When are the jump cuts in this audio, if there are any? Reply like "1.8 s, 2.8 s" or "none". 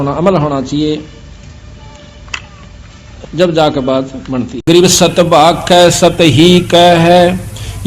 4.6 s